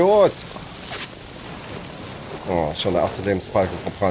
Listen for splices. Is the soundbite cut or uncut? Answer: uncut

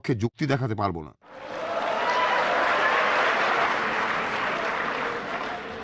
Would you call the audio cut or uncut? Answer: cut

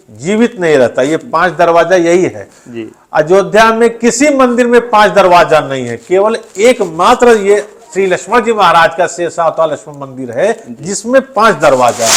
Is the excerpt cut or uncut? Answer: uncut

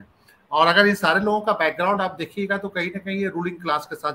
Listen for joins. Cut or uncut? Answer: uncut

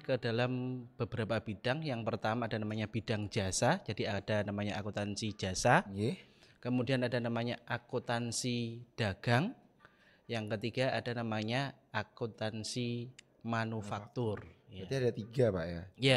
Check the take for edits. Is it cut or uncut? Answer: uncut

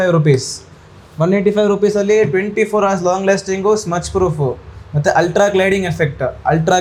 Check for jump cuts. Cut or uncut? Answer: uncut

